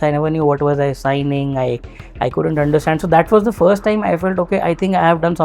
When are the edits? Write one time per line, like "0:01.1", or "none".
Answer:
none